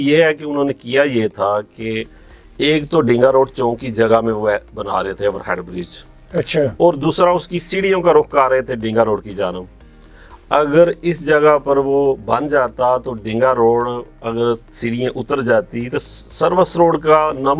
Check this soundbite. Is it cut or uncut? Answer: uncut